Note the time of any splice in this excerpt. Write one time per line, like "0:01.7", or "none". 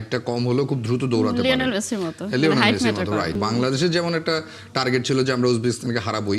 0:03.4